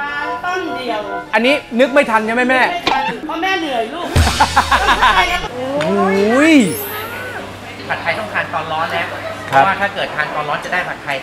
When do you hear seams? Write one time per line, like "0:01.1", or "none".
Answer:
0:05.4
0:07.7